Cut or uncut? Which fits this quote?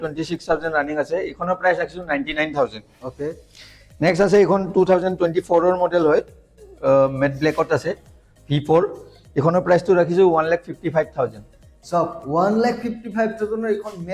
uncut